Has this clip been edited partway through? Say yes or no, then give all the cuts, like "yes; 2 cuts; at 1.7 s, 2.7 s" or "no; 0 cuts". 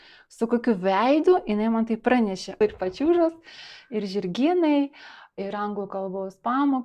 yes; 1 cut; at 2.6 s